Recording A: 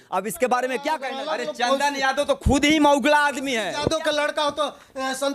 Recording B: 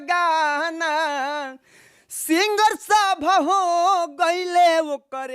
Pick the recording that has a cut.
A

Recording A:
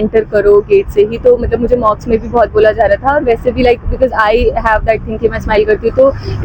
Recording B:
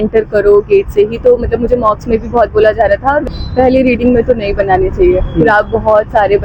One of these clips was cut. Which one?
B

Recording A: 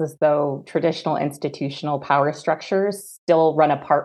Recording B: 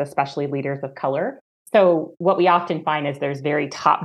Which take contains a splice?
B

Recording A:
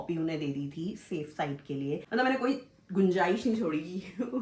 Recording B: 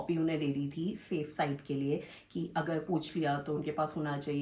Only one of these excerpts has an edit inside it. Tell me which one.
A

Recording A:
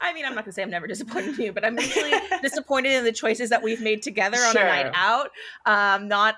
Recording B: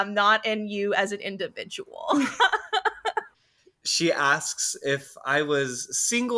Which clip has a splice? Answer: B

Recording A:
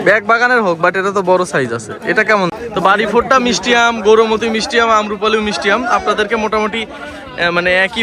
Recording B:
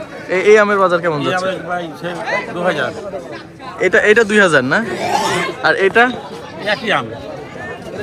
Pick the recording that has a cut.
A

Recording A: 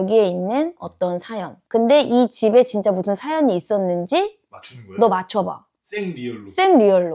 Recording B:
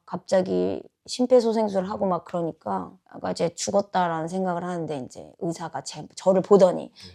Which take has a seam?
A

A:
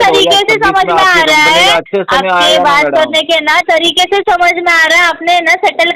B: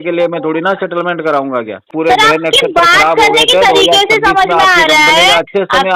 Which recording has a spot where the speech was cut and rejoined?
B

